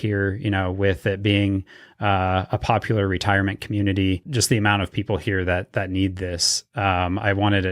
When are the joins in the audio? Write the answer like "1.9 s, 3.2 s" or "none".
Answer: 4.3 s